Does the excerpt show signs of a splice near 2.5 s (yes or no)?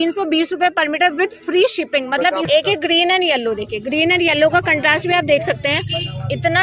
yes